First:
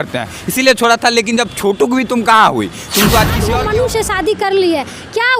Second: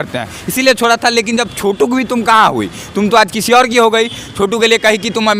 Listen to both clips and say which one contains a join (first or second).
first